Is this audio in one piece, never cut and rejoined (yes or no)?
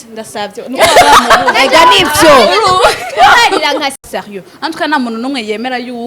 no